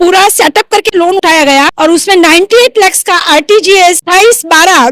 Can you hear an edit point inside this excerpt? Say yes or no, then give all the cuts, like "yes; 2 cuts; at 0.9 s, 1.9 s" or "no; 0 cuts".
yes; 2 cuts; at 1.3 s, 4.0 s